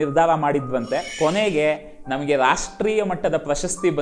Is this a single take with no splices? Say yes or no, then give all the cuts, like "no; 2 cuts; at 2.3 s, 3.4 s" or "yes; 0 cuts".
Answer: no; 1 cut; at 1.1 s